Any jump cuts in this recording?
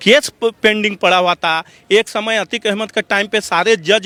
no; 0 cuts

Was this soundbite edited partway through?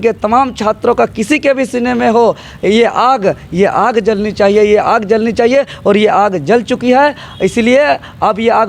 no; 0 cuts

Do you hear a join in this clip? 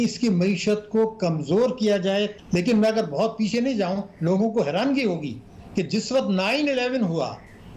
yes; 1 cut; at 2.4 s

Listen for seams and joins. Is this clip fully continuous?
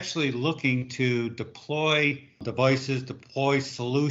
no; 1 cut; at 2.4 s

